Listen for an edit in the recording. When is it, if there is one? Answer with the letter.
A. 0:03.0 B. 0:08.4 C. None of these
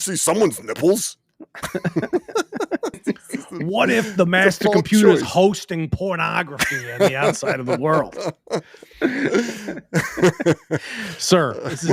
A